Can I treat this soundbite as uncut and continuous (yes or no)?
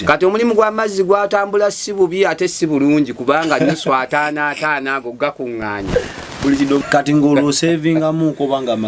no